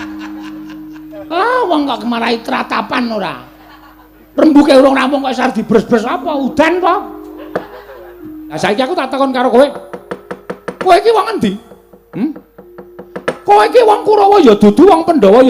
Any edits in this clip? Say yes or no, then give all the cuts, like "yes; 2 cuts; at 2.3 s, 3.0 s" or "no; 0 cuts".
yes; 1 cut; at 8.6 s